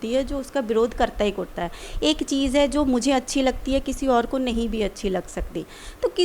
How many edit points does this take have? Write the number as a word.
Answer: zero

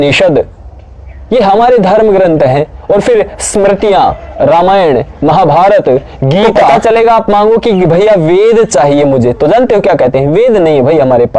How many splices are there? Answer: one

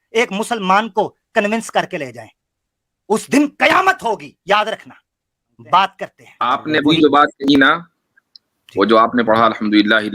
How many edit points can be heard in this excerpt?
one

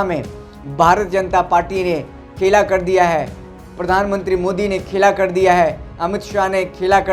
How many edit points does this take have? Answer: zero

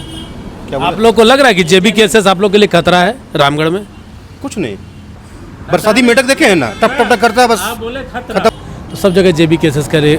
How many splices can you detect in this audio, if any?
two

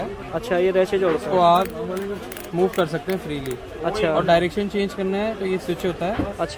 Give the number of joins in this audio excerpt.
zero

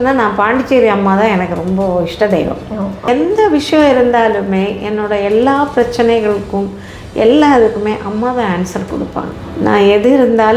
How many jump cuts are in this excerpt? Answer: two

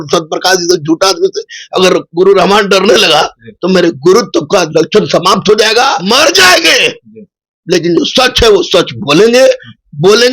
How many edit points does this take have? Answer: one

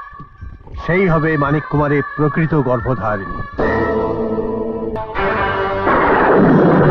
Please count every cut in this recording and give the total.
one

